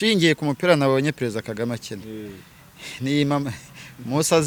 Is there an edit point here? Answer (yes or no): no